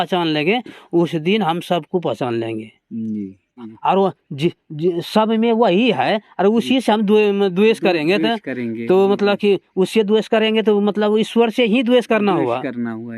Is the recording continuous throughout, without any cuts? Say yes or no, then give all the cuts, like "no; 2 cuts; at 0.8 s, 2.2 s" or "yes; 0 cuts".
no; 1 cut; at 3.7 s